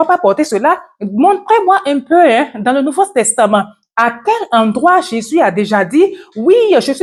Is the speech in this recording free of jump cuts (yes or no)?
yes